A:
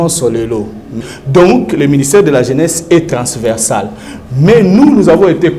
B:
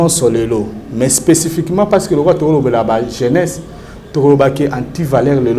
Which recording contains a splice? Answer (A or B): A